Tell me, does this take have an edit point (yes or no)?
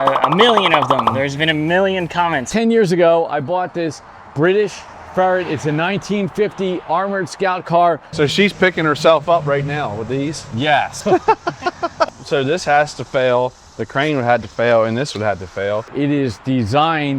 yes